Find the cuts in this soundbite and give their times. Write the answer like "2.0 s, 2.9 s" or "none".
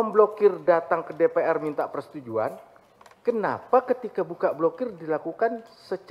none